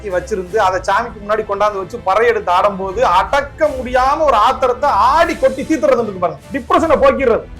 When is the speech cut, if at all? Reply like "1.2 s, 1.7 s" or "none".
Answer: 6.5 s